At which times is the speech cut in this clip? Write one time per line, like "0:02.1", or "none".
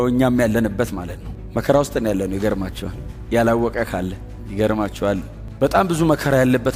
none